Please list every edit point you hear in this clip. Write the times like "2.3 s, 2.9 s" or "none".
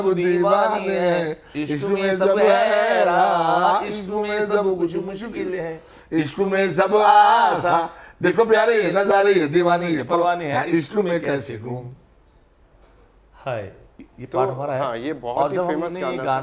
none